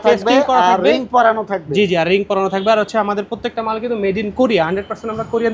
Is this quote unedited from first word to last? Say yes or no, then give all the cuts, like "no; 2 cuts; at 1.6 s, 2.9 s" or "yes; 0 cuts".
yes; 0 cuts